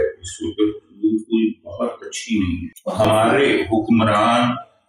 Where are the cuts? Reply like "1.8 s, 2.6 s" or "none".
3.0 s